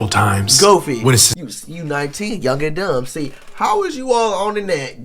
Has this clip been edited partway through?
yes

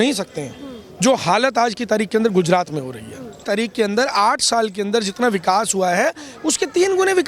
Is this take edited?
yes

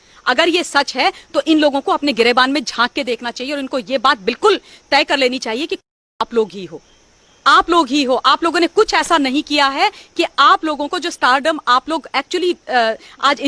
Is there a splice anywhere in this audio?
no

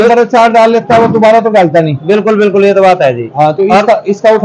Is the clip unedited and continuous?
yes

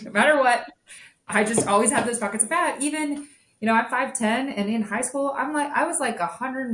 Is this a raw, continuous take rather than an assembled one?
yes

